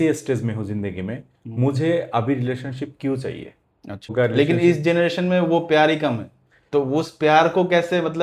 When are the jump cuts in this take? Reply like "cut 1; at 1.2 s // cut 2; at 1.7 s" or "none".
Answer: cut 1; at 4.1 s